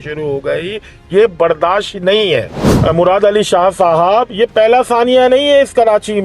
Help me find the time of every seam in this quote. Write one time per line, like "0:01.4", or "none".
0:02.5